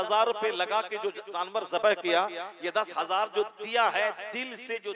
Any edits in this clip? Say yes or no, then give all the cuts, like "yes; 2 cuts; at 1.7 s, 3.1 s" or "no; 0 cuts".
no; 0 cuts